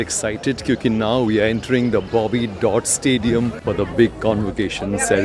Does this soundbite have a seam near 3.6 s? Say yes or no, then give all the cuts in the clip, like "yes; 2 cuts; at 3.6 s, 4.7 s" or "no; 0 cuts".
yes; 1 cut; at 3.6 s